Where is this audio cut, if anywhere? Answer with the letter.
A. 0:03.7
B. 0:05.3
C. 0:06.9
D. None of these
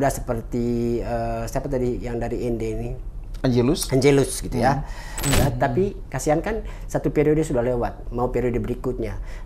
B